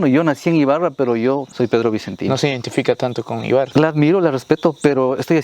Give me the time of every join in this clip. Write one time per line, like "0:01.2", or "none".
0:01.5
0:03.7

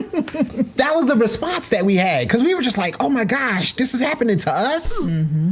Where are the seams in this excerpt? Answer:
none

